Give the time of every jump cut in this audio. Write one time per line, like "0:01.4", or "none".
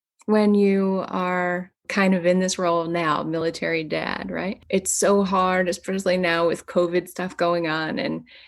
0:01.8
0:04.6